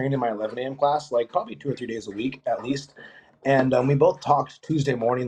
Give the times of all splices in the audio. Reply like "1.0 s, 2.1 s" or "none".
none